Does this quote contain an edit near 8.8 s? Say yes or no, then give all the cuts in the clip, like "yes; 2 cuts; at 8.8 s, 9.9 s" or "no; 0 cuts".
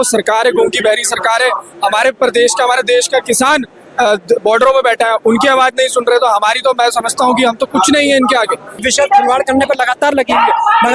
yes; 1 cut; at 8.8 s